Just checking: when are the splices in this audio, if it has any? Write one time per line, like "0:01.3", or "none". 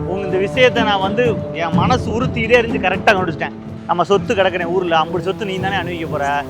0:03.7